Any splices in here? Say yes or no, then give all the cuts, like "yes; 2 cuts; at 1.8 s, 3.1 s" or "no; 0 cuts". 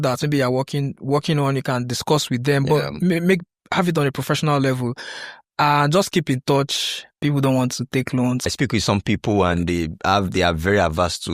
yes; 2 cuts; at 7.2 s, 8.5 s